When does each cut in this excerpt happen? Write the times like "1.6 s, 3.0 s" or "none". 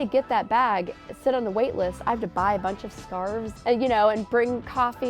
3.5 s